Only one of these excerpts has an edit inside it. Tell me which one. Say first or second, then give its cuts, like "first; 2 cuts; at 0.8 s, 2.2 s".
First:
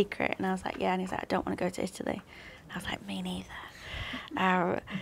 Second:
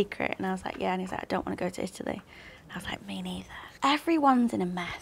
second; 1 cut; at 3.7 s